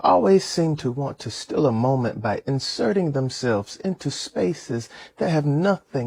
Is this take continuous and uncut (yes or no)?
yes